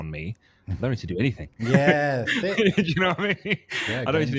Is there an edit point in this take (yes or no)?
no